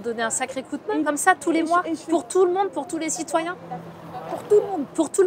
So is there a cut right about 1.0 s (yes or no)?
yes